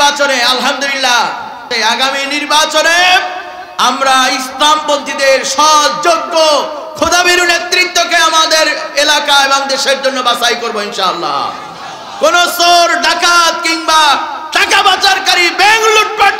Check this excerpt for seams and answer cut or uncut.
cut